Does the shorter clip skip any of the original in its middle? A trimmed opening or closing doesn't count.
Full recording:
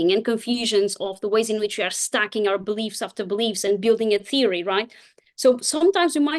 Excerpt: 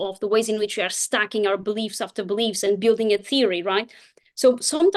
no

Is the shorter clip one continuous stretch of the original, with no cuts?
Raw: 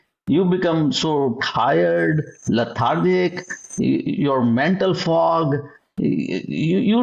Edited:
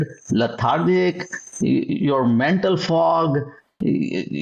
yes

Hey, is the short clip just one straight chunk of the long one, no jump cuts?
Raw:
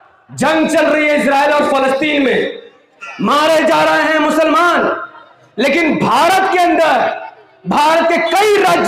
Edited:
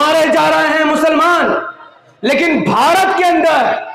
yes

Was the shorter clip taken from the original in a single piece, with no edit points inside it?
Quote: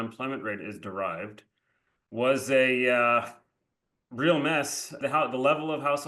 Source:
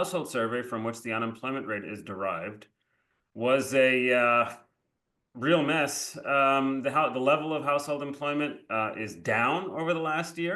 no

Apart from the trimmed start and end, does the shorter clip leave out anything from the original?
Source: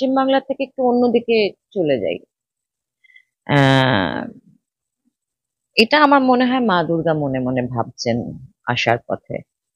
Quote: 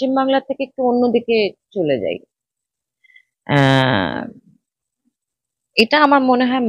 no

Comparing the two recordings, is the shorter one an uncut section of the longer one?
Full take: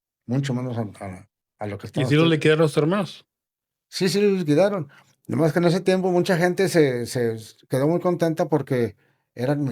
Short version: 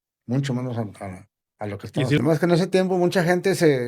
no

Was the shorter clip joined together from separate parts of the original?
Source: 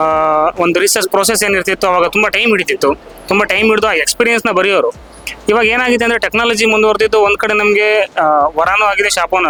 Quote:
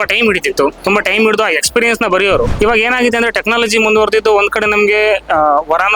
yes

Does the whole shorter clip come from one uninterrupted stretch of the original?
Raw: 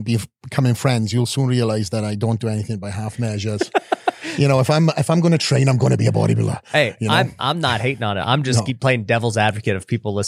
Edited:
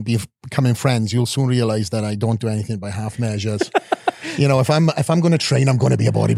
yes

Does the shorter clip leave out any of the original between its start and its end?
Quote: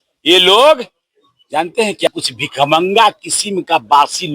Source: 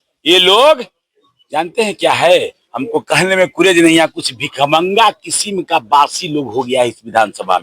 yes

